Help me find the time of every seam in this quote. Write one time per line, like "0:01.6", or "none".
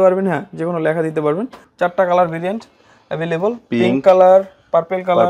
0:01.6